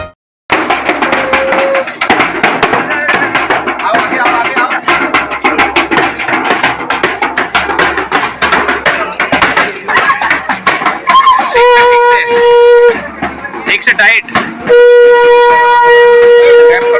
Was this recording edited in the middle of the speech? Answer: no; 0 cuts

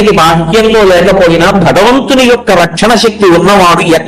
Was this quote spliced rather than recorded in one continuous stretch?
no; 0 cuts

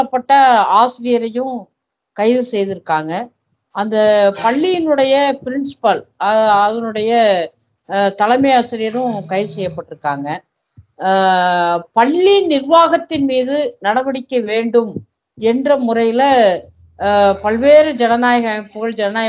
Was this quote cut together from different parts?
no; 0 cuts

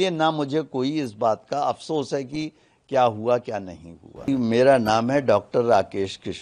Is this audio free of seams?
no; 1 cut; at 4.3 s

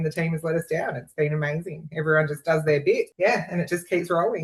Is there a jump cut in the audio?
no; 0 cuts

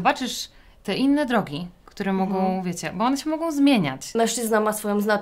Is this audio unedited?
no; 1 cut; at 4.1 s

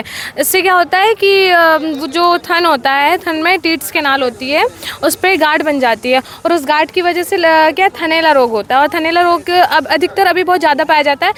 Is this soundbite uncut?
yes; 0 cuts

